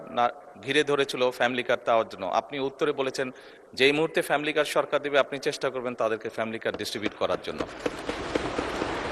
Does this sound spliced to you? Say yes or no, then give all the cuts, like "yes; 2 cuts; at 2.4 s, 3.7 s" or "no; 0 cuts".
no; 0 cuts